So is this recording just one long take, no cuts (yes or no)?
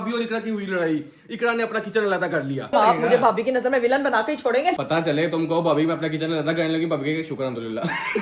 no